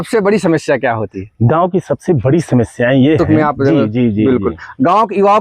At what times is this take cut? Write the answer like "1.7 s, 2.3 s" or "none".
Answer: 3.2 s